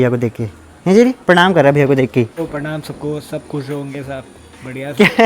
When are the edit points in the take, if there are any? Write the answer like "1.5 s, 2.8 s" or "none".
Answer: 2.4 s